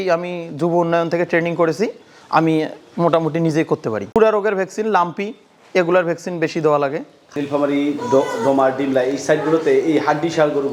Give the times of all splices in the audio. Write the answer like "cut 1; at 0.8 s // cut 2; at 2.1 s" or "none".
none